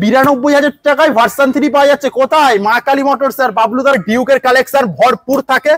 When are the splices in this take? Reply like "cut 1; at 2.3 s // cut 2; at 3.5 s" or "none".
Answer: cut 1; at 4.0 s